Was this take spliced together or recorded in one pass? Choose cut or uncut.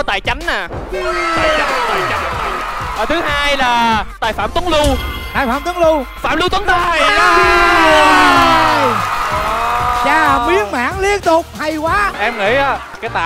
cut